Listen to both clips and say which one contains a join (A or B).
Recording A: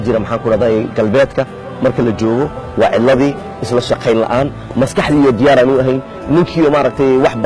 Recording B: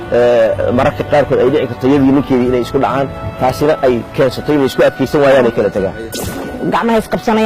B